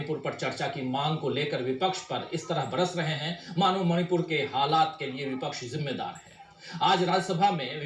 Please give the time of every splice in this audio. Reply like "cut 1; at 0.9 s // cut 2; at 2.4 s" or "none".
none